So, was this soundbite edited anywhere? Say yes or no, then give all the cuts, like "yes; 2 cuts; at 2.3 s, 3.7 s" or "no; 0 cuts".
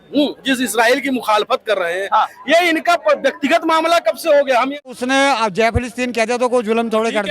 yes; 1 cut; at 4.9 s